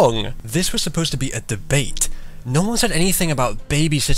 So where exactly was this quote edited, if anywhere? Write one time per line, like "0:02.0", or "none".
0:03.3